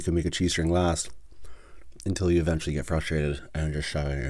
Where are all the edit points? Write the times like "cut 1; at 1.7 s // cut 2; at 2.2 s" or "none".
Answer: none